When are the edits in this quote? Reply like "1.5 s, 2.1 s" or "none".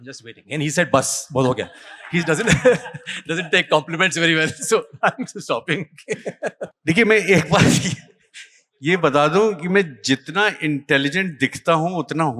6.7 s